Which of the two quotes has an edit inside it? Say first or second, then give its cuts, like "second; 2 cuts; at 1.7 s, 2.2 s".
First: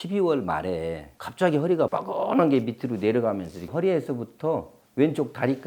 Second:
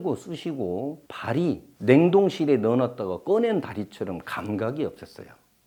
first; 1 cut; at 1.9 s